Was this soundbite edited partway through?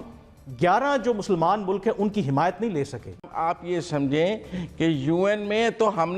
yes; 1 cut; at 3.3 s

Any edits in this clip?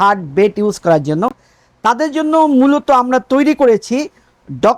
no; 0 cuts

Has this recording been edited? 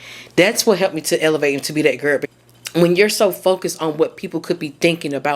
yes; 1 cut; at 2.3 s

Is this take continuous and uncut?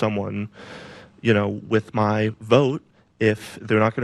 yes; 0 cuts

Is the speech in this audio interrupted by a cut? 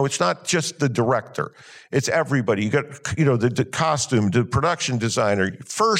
no; 0 cuts

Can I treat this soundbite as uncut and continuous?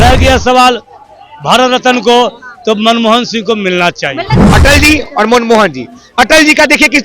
no; 1 cut; at 4.4 s

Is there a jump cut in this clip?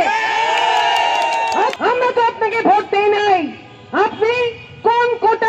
yes; 1 cut; at 1.8 s

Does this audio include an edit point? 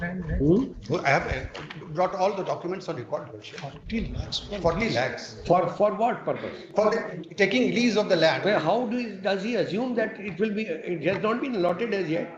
no; 0 cuts

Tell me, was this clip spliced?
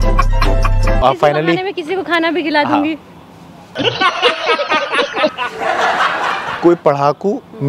yes; 2 cuts; at 1.0 s, 6.6 s

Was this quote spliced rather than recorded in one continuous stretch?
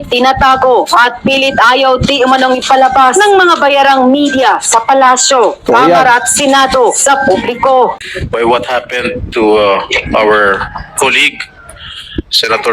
yes; 1 cut; at 8.0 s

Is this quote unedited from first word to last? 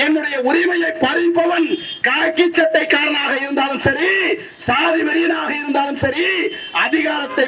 yes; 0 cuts

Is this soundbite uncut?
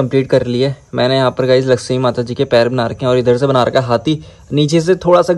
yes; 0 cuts

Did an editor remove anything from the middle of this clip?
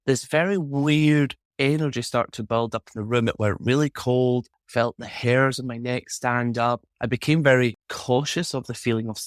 yes; 3 cuts; at 4.6 s, 6.9 s, 7.9 s

